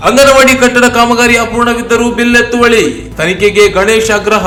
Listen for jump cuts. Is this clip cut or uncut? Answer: uncut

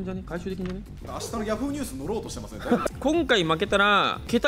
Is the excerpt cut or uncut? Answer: cut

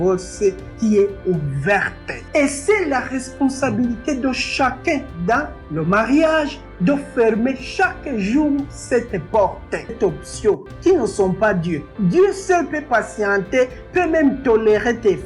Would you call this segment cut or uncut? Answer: cut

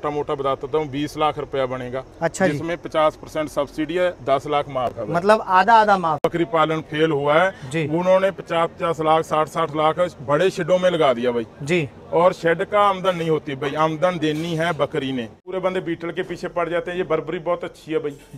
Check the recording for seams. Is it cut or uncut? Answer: cut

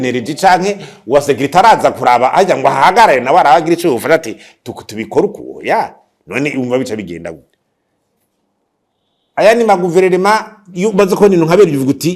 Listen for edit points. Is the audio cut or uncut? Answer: uncut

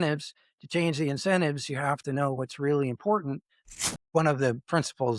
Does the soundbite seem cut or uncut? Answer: cut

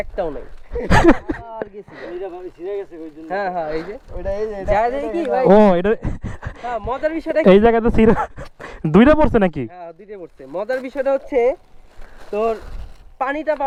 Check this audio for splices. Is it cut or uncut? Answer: uncut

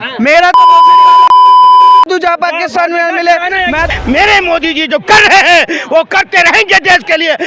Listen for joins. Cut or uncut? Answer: cut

